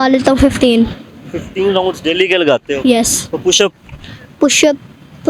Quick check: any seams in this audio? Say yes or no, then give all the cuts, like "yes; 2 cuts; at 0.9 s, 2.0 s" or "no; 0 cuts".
no; 0 cuts